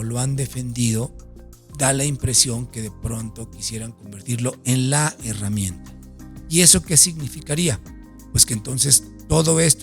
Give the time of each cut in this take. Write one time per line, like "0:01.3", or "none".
none

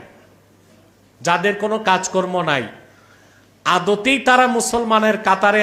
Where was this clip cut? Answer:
none

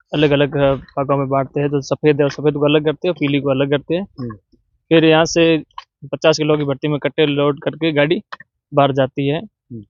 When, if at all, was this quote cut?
none

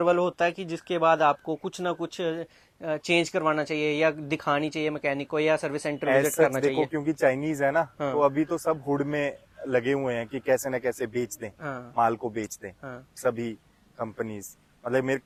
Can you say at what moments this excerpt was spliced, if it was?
none

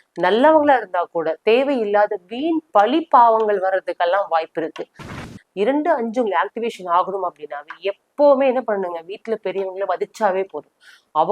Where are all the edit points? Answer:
0:05.0

